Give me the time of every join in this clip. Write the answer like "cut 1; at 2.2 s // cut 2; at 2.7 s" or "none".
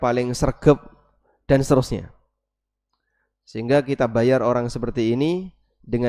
none